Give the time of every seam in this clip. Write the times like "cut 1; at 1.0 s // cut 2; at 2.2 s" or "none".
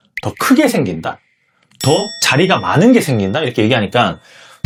none